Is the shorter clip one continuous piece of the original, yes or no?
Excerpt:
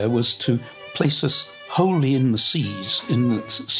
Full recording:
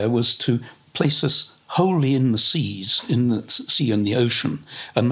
yes